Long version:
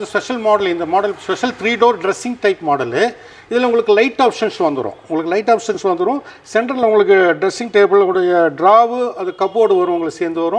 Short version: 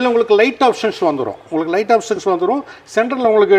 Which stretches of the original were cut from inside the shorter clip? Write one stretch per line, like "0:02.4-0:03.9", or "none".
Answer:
none